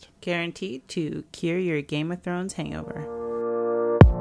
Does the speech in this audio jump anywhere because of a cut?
yes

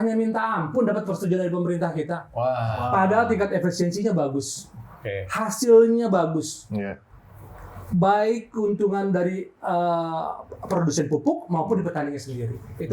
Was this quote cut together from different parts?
no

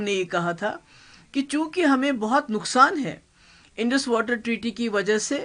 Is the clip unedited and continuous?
yes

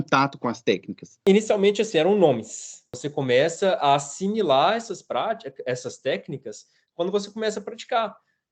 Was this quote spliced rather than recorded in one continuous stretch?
yes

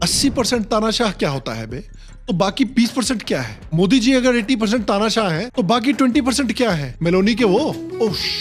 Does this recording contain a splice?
no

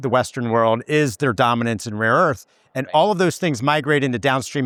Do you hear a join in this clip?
no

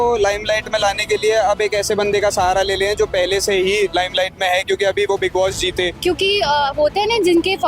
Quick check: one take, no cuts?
no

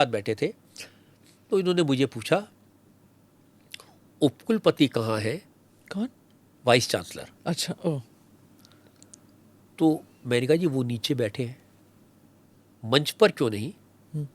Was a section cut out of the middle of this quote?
no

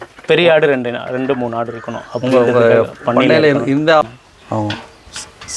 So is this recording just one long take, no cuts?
no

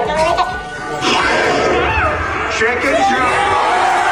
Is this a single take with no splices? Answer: yes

